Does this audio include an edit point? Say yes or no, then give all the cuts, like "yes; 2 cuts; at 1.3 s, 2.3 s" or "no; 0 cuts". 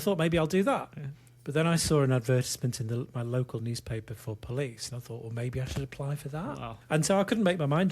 yes; 1 cut; at 6.7 s